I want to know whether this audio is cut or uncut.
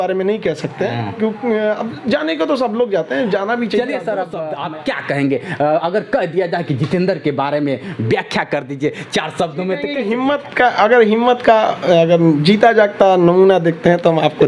cut